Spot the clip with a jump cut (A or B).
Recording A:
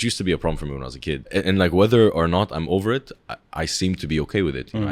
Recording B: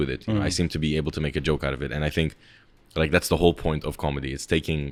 A